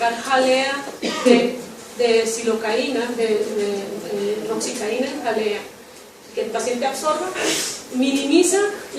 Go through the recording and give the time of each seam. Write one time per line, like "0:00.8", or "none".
0:02.0